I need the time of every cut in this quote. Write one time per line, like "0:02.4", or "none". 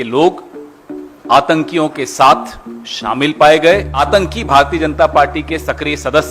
0:03.9

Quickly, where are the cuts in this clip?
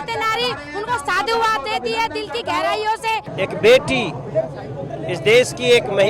0:03.3

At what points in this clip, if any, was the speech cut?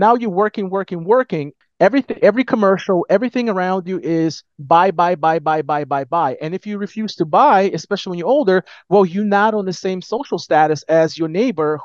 0:01.5

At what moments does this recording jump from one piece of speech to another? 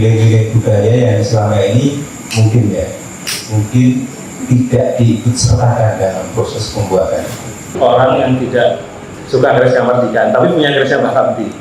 0:07.6

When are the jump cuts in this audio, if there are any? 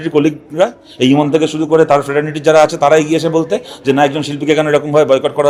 none

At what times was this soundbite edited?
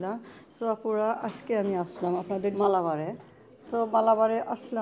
0:02.5

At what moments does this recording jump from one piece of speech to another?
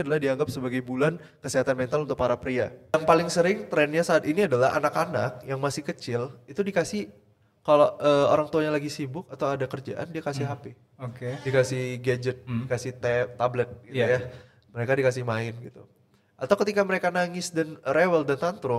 0:02.9

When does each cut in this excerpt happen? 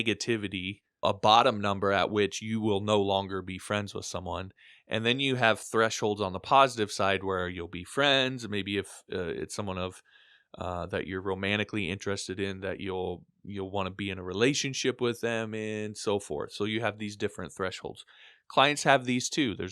0:01.0

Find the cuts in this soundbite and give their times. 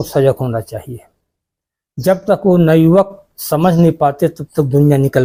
none

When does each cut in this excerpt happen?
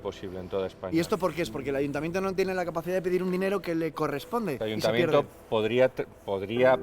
0:04.6

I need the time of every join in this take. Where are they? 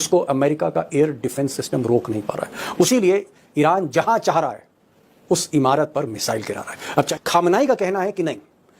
0:02.9
0:07.1

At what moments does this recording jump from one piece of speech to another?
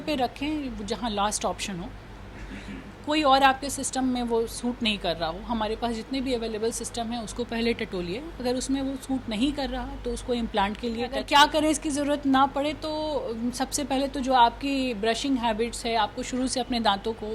0:11.2

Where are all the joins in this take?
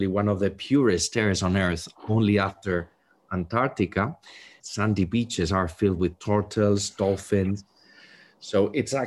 0:04.6

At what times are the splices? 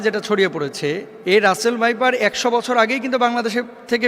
0:01.1

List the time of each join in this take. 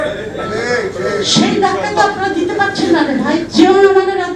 0:03.5

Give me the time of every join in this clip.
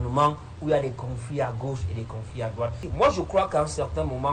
0:02.8

